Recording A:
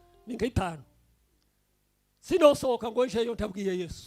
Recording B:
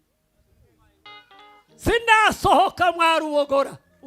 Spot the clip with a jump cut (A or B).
B